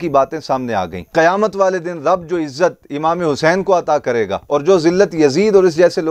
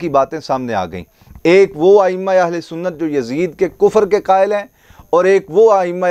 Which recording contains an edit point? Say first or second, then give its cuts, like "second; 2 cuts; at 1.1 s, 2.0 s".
first; 1 cut; at 1.0 s